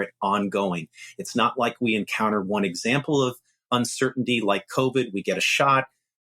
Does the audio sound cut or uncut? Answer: cut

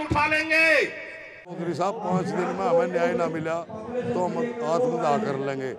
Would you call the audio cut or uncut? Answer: cut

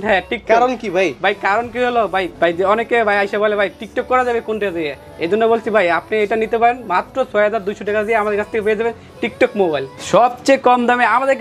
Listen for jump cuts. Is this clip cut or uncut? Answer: cut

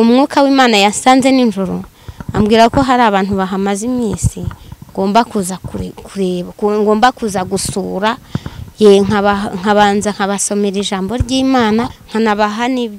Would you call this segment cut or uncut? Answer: cut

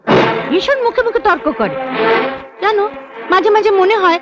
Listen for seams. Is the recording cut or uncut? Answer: uncut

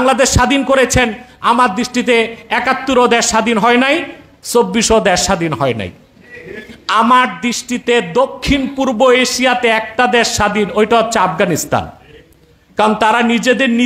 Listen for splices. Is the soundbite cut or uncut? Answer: uncut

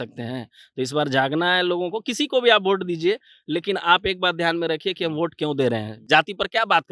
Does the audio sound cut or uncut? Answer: cut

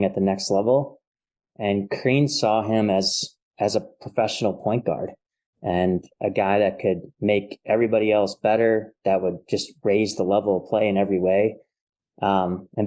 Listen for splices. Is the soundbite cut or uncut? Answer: uncut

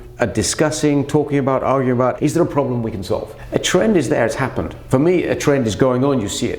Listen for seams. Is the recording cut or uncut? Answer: cut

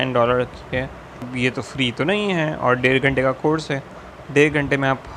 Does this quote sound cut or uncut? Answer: cut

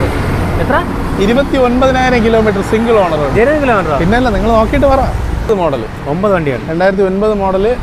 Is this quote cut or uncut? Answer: cut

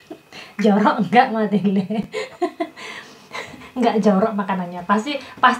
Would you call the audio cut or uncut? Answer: uncut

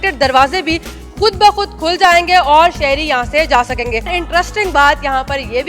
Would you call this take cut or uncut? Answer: cut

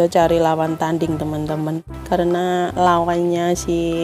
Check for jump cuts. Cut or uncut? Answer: cut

